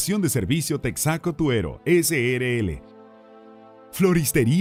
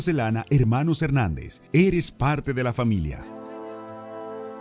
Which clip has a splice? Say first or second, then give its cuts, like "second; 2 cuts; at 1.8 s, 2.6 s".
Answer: second; 1 cut; at 3.2 s